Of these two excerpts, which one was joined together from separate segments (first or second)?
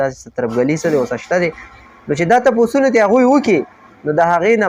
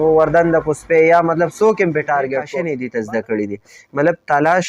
second